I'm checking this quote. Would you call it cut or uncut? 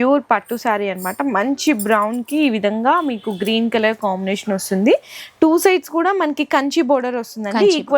uncut